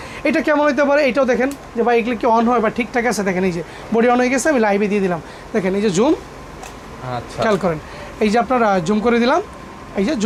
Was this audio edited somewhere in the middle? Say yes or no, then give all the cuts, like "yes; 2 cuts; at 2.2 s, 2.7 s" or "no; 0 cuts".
no; 0 cuts